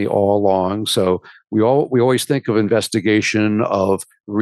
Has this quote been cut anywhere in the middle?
no; 0 cuts

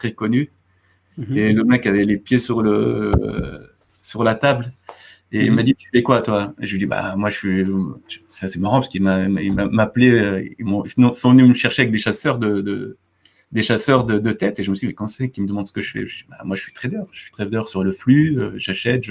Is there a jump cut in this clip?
no; 0 cuts

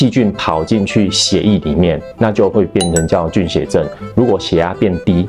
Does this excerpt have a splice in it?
no; 0 cuts

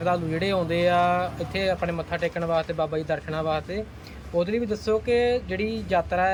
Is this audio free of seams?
yes; 0 cuts

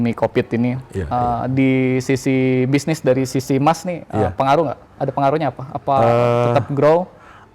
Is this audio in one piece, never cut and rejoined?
yes; 0 cuts

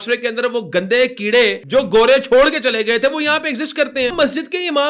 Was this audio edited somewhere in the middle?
yes; 2 cuts; at 1.6 s, 4.1 s

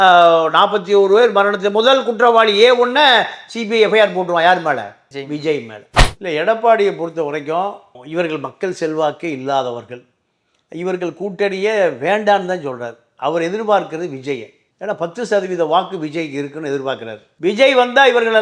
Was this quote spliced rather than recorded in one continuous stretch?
yes; 1 cut; at 6.1 s

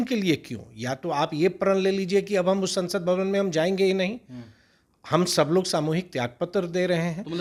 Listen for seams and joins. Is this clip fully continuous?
yes; 0 cuts

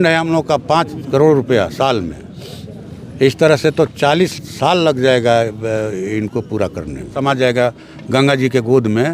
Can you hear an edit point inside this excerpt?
yes; 1 cut; at 7.1 s

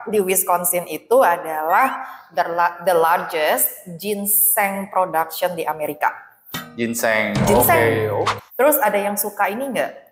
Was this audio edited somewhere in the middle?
yes; 1 cut; at 8.3 s

